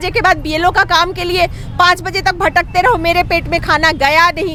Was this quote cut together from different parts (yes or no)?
no